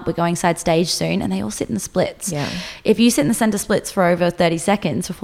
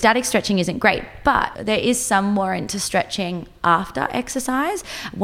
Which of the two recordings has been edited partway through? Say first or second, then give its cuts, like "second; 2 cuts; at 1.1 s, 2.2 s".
second; 1 cut; at 1.5 s